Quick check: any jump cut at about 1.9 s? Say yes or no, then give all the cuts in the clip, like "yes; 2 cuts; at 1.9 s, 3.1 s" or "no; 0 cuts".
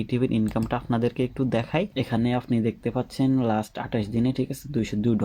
yes; 1 cut; at 1.9 s